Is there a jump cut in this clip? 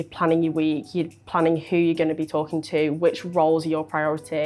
no; 0 cuts

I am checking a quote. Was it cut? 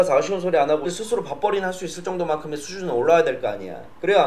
yes; 1 cut; at 0.9 s

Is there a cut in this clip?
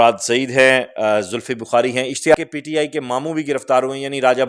yes; 1 cut; at 2.3 s

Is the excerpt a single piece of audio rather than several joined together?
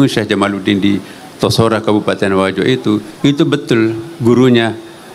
yes; 0 cuts

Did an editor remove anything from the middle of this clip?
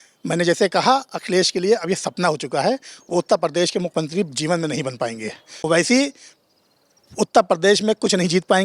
yes; 1 cut; at 5.6 s

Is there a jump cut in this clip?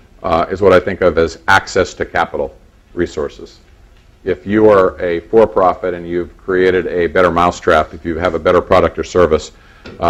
no; 0 cuts

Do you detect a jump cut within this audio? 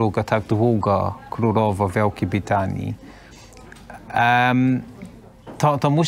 no; 0 cuts

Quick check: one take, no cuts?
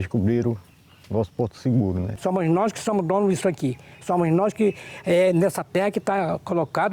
no; 1 cut; at 2.1 s

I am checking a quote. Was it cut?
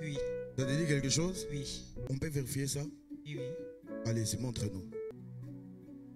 yes; 2 cuts; at 2.0 s, 5.1 s

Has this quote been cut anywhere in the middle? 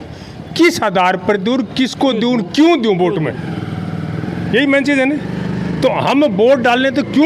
no; 0 cuts

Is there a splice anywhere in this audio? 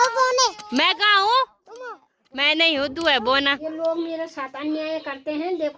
yes; 1 cut; at 3.6 s

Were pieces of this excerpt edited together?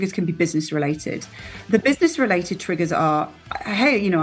no; 0 cuts

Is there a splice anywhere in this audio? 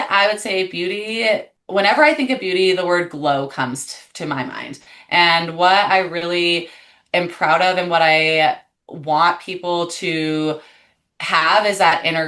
yes; 1 cut; at 1.6 s

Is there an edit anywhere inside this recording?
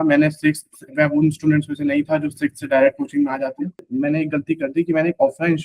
yes; 1 cut; at 3.9 s

